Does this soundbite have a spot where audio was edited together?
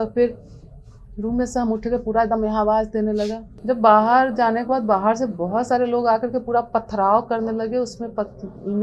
yes; 1 cut; at 3.5 s

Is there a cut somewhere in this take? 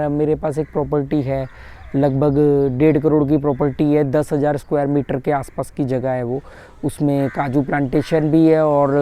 no; 0 cuts

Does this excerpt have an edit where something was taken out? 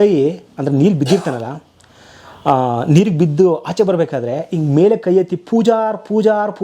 no; 0 cuts

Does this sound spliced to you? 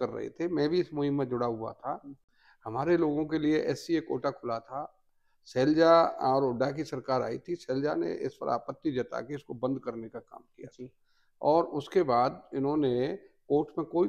no; 0 cuts

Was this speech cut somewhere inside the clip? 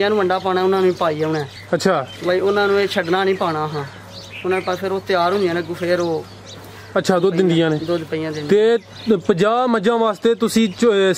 no; 0 cuts

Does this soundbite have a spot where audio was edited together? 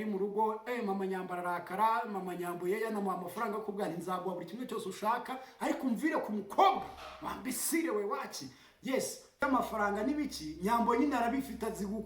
yes; 1 cut; at 9.3 s

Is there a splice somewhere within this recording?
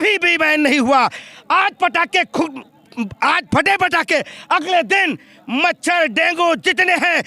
no; 0 cuts

